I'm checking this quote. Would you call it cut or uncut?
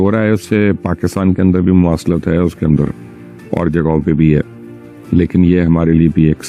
uncut